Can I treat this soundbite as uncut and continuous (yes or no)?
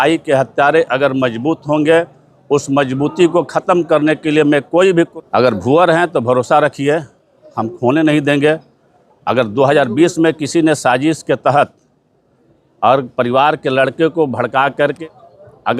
no